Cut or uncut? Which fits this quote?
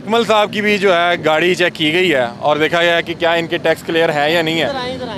uncut